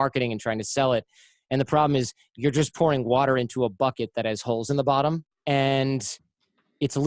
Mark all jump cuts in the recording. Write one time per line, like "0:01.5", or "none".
0:05.3